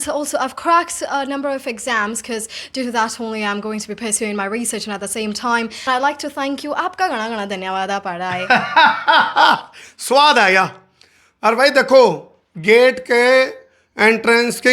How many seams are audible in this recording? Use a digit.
1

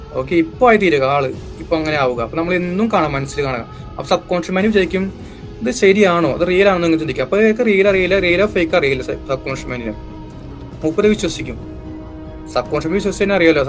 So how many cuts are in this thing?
0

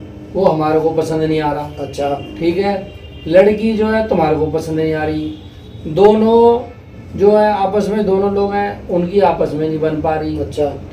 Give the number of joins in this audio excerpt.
0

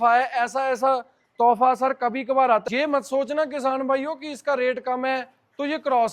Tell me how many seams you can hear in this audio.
1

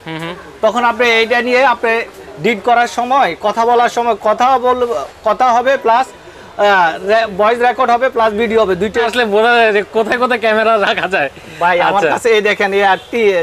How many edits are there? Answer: 1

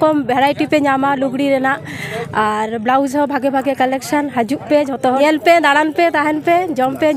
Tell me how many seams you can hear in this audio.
1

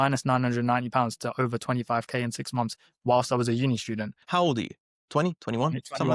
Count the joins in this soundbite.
1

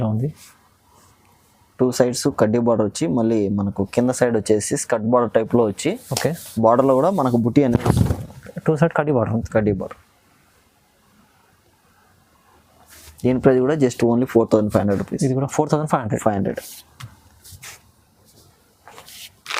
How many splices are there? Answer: 0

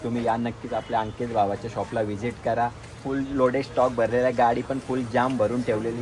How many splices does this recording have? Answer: 0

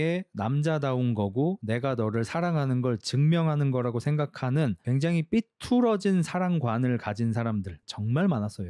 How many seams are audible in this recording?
1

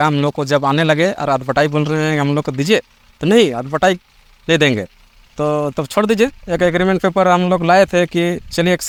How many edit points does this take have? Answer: 0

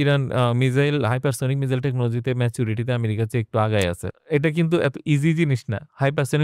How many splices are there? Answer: 1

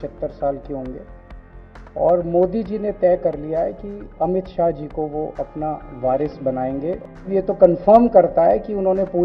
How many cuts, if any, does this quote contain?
1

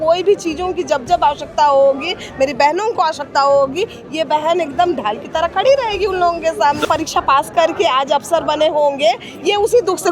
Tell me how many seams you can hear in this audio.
1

